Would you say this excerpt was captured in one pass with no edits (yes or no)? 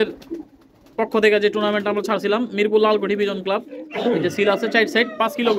yes